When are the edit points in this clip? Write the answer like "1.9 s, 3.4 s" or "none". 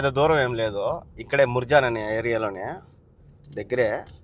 none